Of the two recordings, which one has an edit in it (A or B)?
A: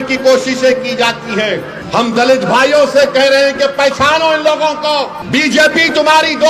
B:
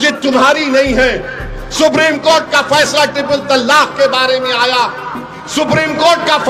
A